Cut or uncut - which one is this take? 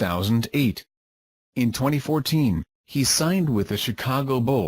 cut